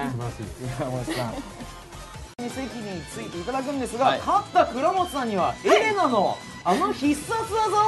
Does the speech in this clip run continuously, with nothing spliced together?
yes; 0 cuts

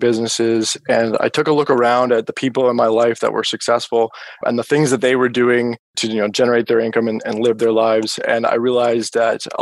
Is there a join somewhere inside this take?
yes; 1 cut; at 6.0 s

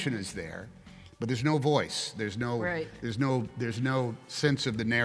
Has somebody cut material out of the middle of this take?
no; 0 cuts

